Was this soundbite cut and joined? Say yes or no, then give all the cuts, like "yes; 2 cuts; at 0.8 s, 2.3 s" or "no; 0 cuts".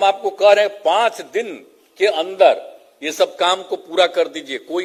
no; 0 cuts